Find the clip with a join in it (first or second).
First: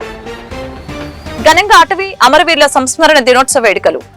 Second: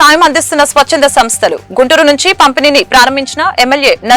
first